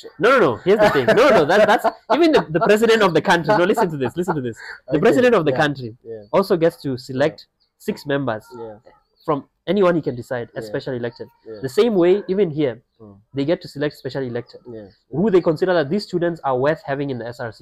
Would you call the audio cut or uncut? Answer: uncut